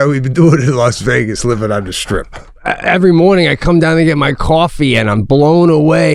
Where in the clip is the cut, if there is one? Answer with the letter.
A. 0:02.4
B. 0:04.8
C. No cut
A